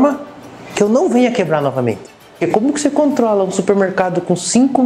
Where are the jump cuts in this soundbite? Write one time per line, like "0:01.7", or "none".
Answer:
0:02.2